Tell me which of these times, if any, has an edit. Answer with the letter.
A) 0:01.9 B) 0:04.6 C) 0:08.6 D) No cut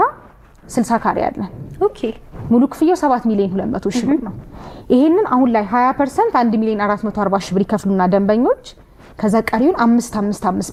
D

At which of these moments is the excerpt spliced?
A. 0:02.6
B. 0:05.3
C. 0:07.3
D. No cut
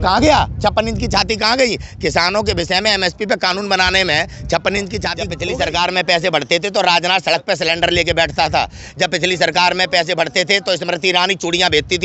B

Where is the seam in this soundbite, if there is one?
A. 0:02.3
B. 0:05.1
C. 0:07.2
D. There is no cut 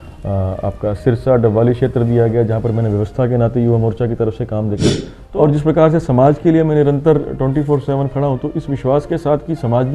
B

